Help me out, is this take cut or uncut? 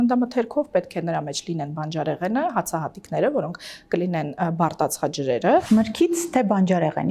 cut